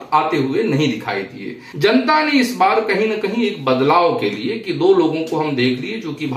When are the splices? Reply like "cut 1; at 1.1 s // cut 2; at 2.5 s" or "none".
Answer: cut 1; at 1.6 s